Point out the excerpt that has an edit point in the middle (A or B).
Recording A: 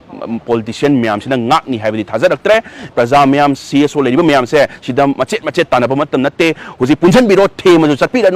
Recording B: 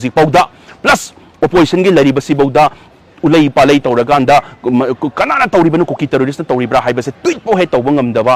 A